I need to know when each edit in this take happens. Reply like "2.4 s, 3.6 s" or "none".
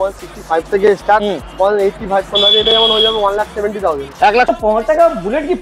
4.6 s